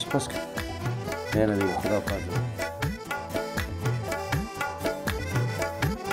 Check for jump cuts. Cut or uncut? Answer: cut